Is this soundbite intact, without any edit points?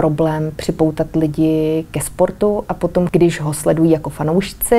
no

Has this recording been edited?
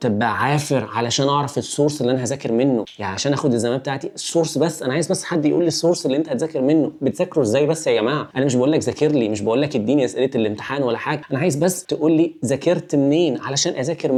no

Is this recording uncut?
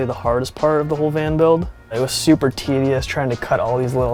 yes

